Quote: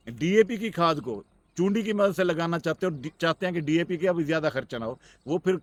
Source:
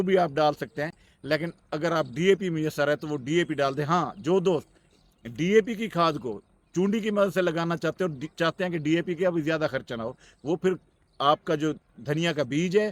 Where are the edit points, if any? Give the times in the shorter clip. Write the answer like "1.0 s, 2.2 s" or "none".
none

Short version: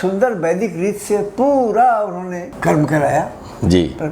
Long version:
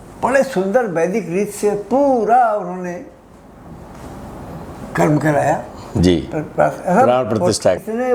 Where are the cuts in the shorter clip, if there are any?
2.5 s

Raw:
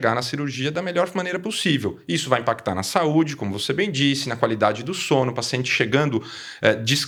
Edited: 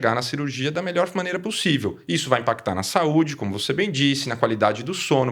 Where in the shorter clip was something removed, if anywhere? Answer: none

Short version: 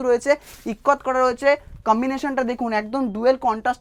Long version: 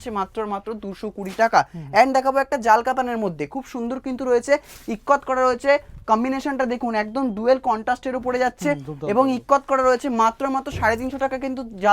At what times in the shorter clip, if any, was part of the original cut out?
none

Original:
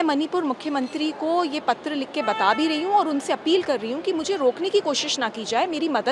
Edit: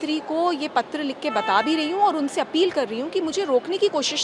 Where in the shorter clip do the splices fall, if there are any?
none

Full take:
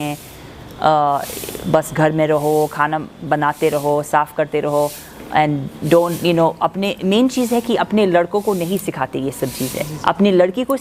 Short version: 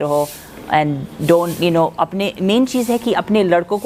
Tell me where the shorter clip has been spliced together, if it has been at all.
none

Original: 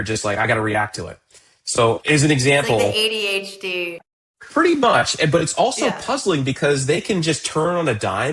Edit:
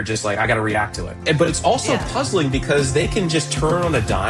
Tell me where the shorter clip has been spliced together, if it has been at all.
1.2 s

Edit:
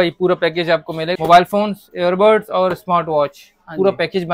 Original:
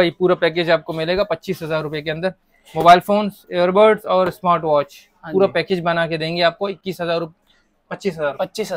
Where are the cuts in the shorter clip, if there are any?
1.1 s

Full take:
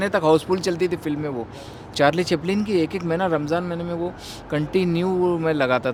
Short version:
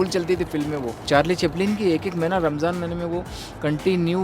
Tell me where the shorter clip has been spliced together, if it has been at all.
0.9 s

